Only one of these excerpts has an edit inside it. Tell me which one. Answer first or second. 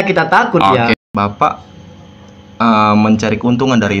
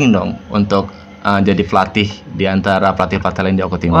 first